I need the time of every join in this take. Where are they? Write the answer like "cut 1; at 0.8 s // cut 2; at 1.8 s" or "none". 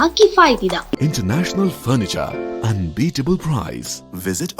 cut 1; at 1.0 s